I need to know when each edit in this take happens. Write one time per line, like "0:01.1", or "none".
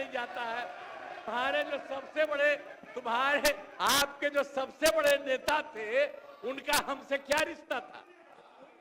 0:01.2